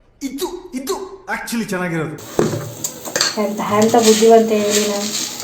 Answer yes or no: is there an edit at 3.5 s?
no